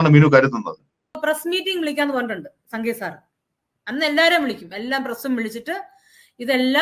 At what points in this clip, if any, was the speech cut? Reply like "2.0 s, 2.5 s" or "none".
1.2 s